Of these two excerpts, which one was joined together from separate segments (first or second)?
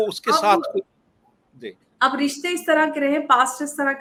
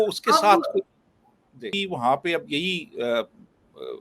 second